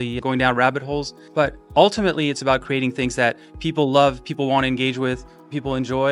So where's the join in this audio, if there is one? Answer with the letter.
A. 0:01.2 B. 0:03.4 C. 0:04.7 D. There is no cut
A